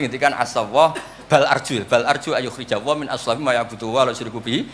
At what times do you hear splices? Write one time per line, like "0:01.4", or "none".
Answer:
none